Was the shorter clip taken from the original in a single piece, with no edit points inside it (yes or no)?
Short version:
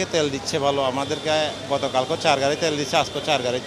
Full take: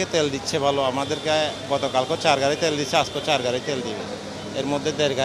yes